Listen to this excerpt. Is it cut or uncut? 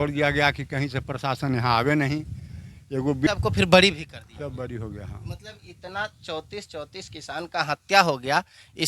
cut